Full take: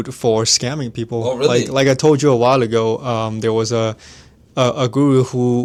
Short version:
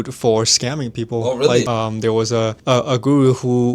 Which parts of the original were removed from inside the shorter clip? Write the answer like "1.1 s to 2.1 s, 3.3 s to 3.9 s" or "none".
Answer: 1.7 s to 3.1 s, 4.0 s to 4.5 s